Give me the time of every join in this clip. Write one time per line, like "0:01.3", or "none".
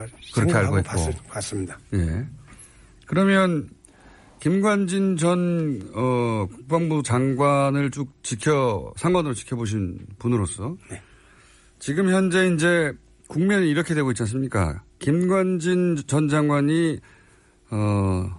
0:16.8